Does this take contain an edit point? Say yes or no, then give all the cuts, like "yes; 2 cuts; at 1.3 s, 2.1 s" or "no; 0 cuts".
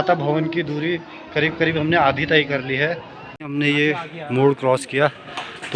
yes; 1 cut; at 3.2 s